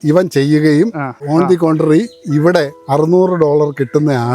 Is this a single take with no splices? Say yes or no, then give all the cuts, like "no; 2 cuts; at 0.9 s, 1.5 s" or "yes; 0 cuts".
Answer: no; 2 cuts; at 1.2 s, 2.8 s